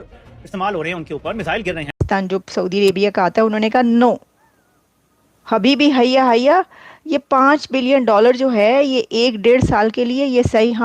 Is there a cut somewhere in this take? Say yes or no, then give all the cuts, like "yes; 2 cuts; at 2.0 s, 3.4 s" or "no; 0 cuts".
yes; 1 cut; at 2.0 s